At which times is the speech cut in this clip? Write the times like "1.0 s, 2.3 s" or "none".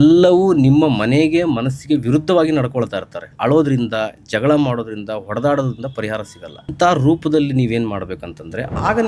3.3 s, 6.7 s